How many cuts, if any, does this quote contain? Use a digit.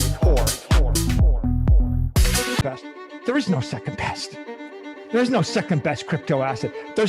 1